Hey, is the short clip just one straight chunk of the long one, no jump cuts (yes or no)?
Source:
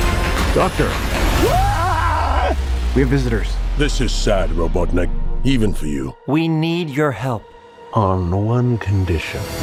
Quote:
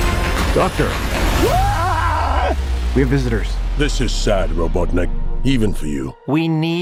yes